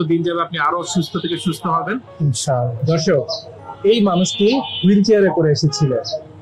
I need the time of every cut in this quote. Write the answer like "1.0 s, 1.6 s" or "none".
2.7 s